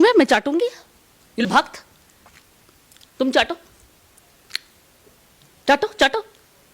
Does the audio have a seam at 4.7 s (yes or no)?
no